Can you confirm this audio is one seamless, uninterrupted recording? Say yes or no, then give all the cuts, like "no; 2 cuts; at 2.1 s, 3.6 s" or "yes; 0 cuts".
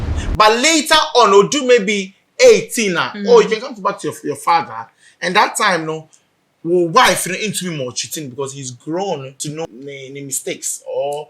no; 1 cut; at 9.7 s